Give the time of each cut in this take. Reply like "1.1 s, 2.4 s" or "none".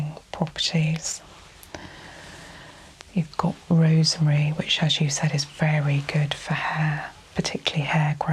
none